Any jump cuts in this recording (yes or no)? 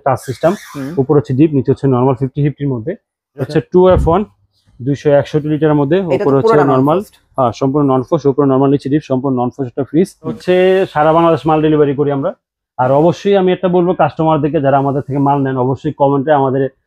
yes